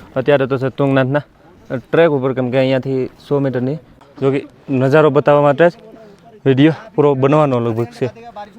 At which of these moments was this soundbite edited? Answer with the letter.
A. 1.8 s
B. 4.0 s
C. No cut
B